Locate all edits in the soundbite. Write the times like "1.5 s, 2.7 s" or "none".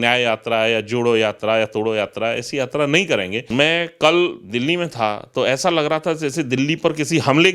3.4 s